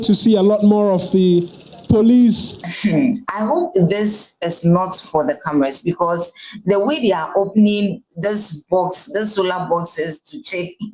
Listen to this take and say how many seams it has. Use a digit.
1